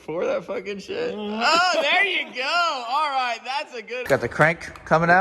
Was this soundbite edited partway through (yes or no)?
yes